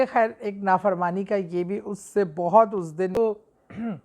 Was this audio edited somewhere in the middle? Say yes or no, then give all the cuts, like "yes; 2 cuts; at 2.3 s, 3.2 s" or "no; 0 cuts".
yes; 1 cut; at 3.2 s